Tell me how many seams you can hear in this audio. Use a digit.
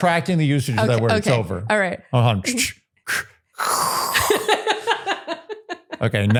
0